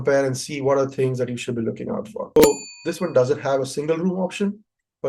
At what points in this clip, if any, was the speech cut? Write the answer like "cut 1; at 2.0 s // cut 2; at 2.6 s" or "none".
cut 1; at 2.4 s